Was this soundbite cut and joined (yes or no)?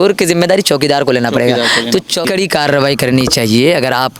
yes